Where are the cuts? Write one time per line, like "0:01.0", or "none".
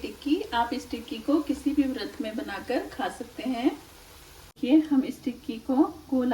0:04.5